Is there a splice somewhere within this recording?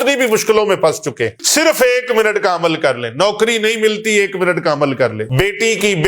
yes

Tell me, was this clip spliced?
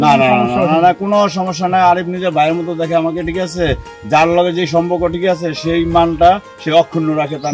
no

